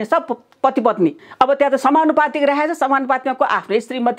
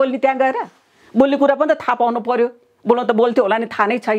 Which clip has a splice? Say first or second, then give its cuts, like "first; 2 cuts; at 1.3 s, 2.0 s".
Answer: first; 1 cut; at 1.2 s